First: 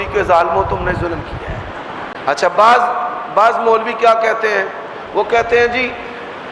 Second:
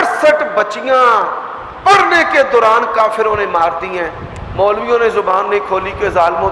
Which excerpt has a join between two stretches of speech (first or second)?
first